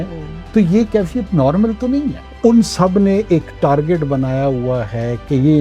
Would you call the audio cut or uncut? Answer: cut